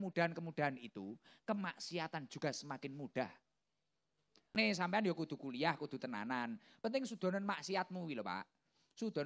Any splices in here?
yes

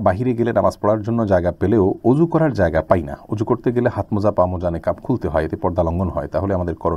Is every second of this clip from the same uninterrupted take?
yes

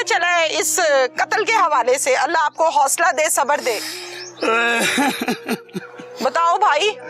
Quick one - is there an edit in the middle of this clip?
no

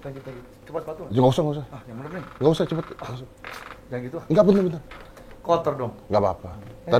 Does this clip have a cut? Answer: no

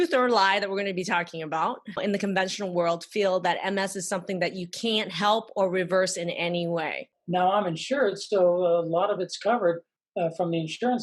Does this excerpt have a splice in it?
yes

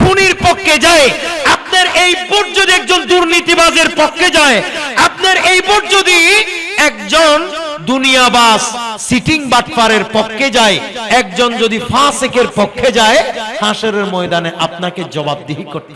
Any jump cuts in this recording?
no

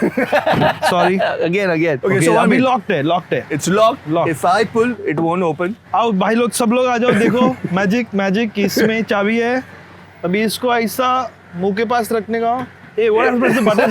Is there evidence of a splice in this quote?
yes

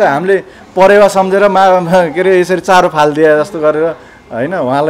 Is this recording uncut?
yes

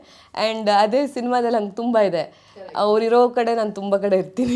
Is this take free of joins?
yes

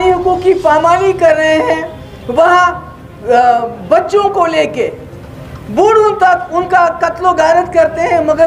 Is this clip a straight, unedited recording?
yes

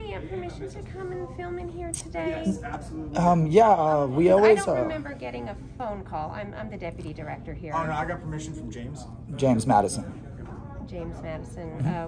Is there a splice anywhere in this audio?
no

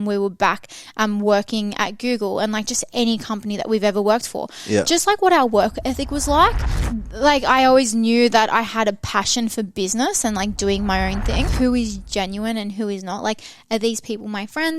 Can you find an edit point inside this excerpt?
yes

